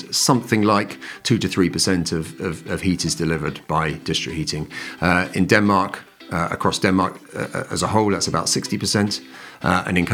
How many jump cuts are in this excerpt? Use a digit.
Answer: 0